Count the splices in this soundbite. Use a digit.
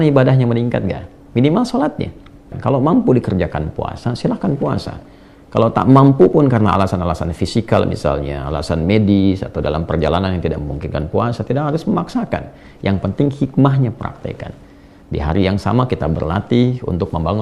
1